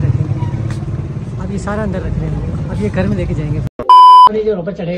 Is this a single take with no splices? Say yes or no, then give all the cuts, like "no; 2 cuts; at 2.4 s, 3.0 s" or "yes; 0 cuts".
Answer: yes; 0 cuts